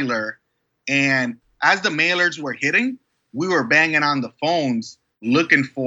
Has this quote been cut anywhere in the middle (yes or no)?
yes